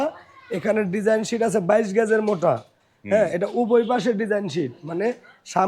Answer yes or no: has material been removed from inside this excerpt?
no